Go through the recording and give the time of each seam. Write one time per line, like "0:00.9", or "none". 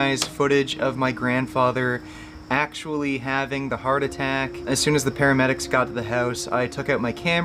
0:04.7